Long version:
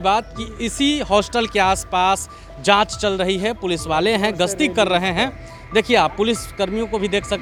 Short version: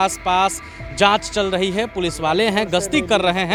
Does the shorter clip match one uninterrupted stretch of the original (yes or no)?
yes